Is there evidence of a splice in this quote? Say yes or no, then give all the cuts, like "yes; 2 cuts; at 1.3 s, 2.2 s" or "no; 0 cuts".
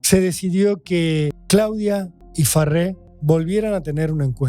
yes; 3 cuts; at 1.4 s, 2.2 s, 3.1 s